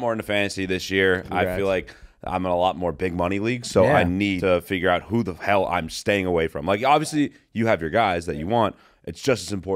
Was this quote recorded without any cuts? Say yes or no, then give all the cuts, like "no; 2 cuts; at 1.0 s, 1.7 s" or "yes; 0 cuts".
no; 1 cut; at 4.4 s